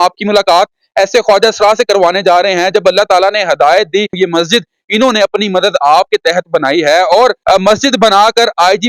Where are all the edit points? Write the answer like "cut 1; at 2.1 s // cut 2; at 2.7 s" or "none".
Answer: cut 1; at 4.1 s // cut 2; at 7.4 s